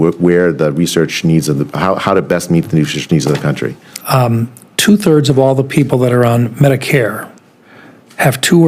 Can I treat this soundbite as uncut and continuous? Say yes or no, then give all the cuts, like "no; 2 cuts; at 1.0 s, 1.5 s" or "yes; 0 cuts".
no; 1 cut; at 3.9 s